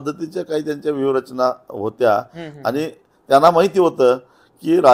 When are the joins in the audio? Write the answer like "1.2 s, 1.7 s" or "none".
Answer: none